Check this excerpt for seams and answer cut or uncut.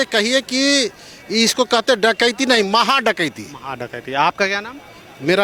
uncut